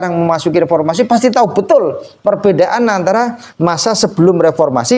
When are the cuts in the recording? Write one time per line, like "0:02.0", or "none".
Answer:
none